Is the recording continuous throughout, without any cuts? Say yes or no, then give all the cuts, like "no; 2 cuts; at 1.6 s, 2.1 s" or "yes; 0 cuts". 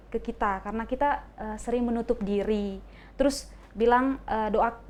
yes; 0 cuts